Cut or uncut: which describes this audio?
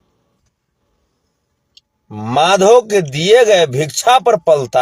uncut